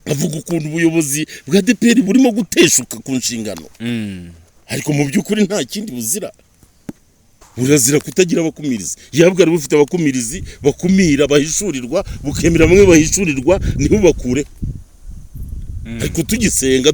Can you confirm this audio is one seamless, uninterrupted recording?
yes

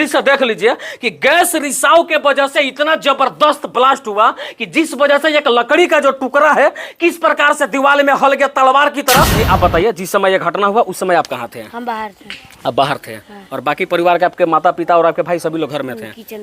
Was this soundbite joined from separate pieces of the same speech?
yes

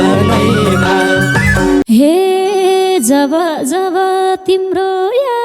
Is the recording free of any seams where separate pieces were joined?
no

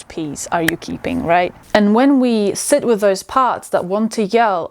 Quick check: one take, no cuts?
no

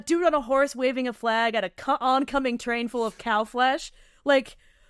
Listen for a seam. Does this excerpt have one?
no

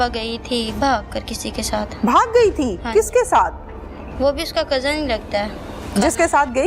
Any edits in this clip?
no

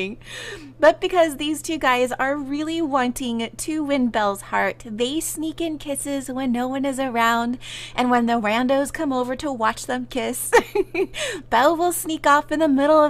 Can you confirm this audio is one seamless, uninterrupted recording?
yes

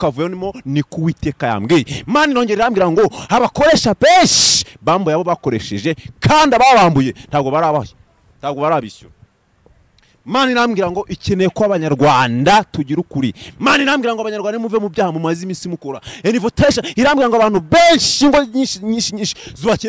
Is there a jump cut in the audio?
no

